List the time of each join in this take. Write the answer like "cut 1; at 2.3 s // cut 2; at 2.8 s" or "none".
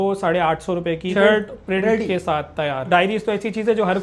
cut 1; at 1.1 s // cut 2; at 2.9 s